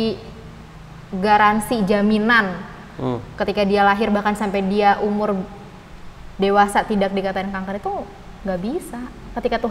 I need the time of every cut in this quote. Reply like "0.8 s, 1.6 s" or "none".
none